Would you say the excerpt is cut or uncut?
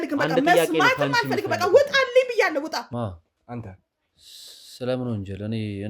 cut